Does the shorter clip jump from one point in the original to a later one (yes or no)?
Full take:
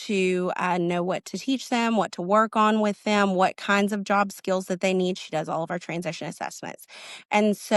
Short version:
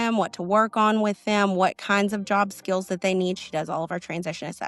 no